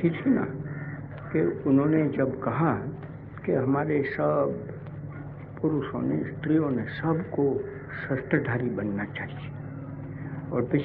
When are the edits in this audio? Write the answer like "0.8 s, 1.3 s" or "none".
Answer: 2.0 s